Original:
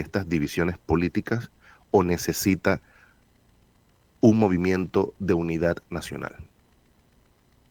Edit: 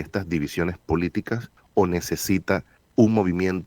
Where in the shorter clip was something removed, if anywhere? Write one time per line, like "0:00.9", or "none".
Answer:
0:01.6
0:02.8